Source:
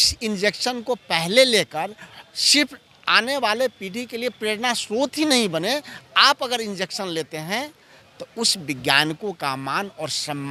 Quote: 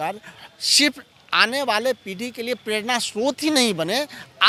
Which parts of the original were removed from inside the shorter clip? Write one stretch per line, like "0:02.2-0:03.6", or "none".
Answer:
none